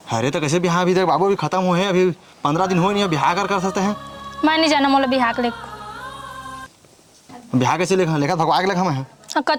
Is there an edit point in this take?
no; 0 cuts

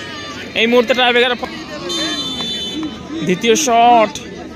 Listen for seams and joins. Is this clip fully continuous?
no; 1 cut; at 1.2 s

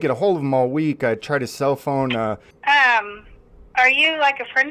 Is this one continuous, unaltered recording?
no; 1 cut; at 2.5 s

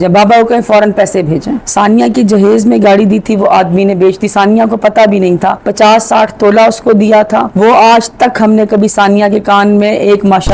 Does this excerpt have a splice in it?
no; 0 cuts

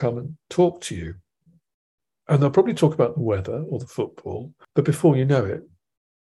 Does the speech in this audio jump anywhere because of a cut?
yes; 1 cut; at 4.5 s

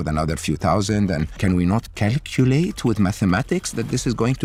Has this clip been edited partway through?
no; 0 cuts

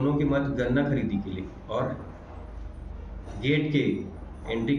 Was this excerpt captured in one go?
yes; 0 cuts

